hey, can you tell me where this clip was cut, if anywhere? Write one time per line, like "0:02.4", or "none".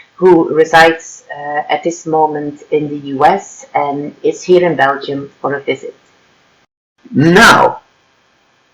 0:07.0